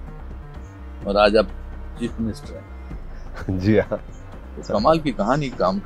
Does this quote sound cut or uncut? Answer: uncut